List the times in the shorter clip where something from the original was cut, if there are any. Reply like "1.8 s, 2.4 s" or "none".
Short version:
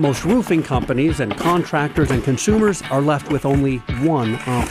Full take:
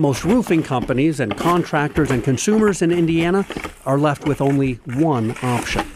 2.8 s